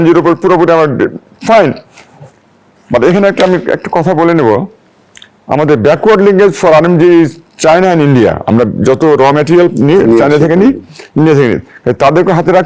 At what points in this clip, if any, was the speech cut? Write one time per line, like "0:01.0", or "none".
none